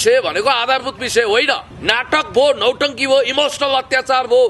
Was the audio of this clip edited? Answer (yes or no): yes